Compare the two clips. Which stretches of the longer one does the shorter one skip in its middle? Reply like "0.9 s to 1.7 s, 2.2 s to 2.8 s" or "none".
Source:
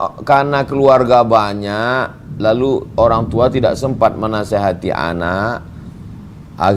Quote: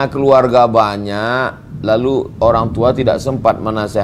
none